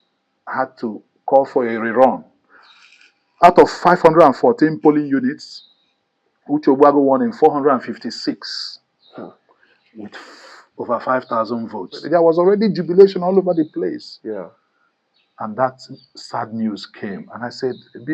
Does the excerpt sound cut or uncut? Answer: cut